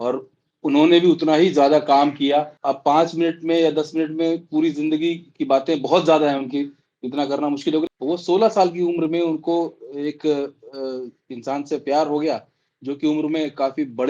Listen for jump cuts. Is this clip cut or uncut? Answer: cut